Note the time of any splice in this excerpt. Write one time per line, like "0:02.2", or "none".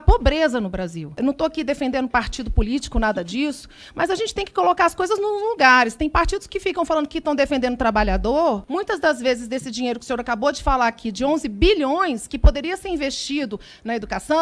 0:01.2
0:08.6